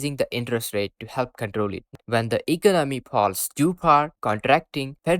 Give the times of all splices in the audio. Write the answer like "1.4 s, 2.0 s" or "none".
2.0 s

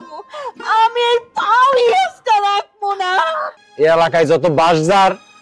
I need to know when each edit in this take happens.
3.6 s

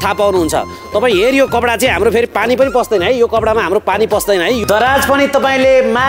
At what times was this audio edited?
4.6 s

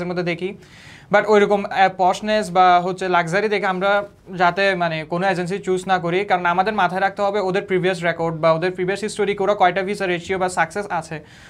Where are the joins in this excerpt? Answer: none

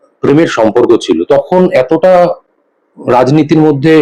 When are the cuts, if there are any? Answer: none

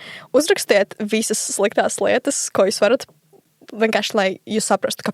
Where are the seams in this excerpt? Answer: 3.4 s

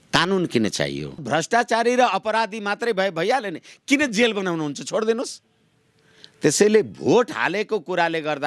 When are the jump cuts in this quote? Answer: 1.2 s

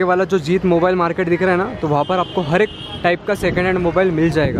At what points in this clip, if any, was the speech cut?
none

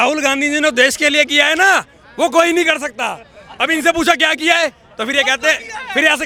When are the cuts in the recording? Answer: none

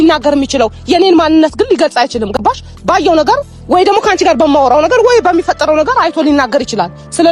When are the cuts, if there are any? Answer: none

